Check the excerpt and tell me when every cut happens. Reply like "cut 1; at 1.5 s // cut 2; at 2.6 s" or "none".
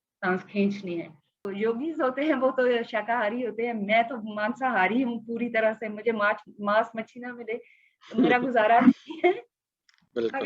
cut 1; at 1.5 s